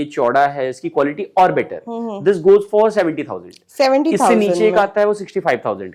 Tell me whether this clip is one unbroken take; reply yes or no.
yes